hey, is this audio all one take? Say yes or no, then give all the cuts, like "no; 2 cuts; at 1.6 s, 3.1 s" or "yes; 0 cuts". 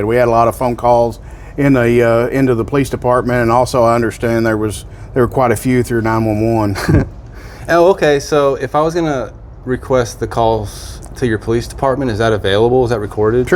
yes; 0 cuts